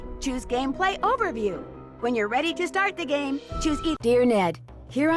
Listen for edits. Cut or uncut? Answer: cut